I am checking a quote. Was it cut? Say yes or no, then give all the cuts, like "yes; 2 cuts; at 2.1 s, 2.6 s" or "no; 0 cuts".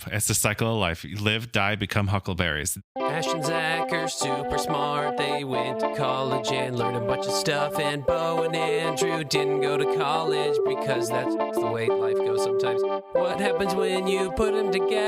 yes; 1 cut; at 2.8 s